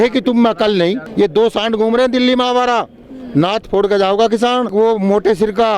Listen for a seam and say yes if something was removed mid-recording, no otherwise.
yes